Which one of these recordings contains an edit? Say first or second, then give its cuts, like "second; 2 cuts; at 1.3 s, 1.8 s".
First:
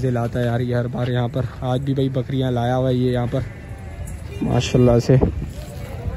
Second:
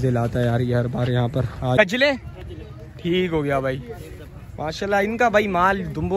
second; 1 cut; at 1.8 s